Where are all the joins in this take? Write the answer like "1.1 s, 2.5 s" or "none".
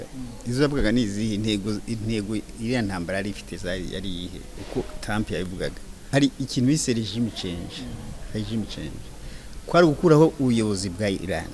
6.1 s